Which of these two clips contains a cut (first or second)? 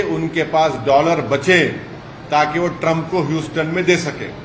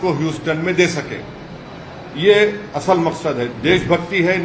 second